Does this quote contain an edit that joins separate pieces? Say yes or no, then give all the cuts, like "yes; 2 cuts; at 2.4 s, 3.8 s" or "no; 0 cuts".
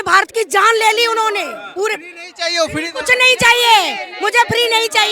no; 0 cuts